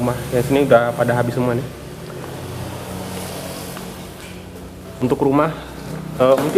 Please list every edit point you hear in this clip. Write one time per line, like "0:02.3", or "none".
none